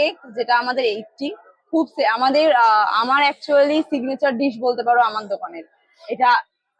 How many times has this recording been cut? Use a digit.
0